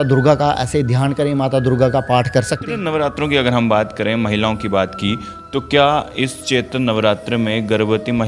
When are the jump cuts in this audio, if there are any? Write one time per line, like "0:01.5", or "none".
0:02.6